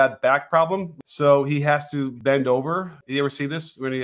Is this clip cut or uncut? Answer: cut